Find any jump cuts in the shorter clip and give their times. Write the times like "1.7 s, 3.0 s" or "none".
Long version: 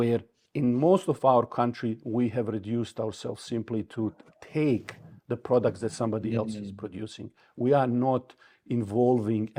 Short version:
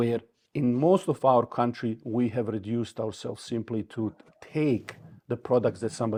none